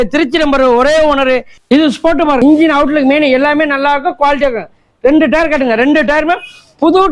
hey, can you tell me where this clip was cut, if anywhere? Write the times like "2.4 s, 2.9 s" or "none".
1.5 s, 2.4 s